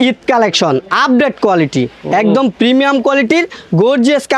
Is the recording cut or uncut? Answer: uncut